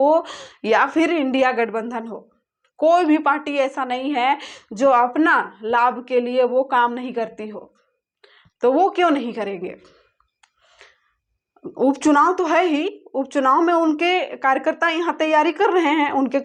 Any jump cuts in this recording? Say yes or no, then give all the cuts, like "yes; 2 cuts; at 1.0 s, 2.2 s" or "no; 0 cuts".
no; 0 cuts